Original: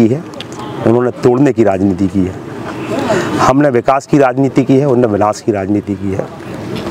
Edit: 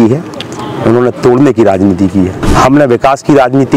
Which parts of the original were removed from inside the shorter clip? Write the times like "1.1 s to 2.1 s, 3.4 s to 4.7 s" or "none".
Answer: 2.4 s to 3.3 s